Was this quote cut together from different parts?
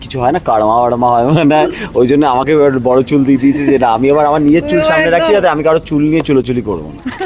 no; 0 cuts

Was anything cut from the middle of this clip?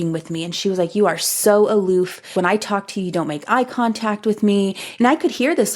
yes; 2 cuts; at 2.2 s, 4.8 s

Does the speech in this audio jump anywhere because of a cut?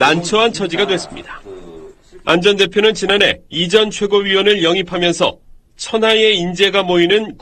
yes; 1 cut; at 4.3 s

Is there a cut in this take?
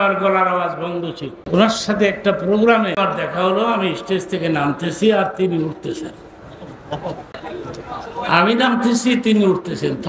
yes; 2 cuts; at 1.3 s, 3.0 s

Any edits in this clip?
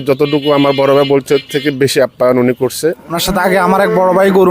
yes; 1 cut; at 3.1 s

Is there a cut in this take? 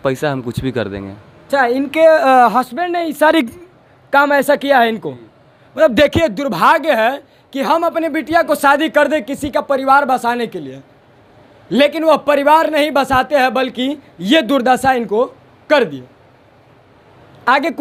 no; 0 cuts

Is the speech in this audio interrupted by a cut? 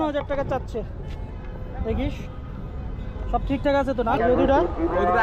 yes; 1 cut; at 4.2 s

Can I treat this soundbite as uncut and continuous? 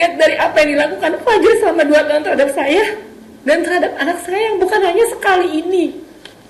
yes; 0 cuts

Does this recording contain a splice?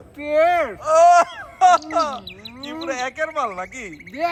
no; 0 cuts

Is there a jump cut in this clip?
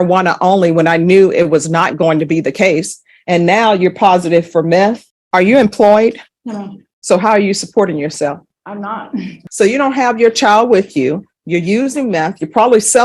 yes; 2 cuts; at 5.1 s, 9.4 s

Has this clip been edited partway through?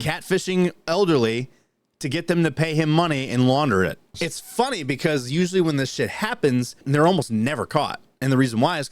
yes; 2 cuts; at 4.1 s, 6.8 s

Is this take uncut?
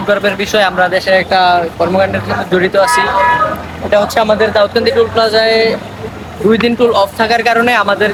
yes; 0 cuts

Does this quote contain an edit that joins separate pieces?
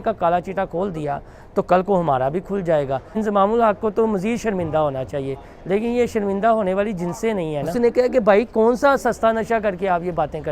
yes; 2 cuts; at 3.2 s, 7.7 s

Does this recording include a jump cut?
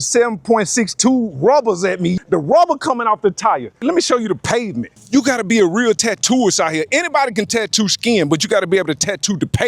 yes; 3 cuts; at 2.1 s, 3.8 s, 5.0 s

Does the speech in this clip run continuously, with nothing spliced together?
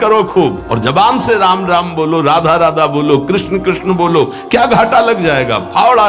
yes; 0 cuts

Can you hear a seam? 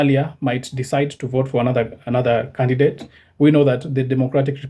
no; 0 cuts

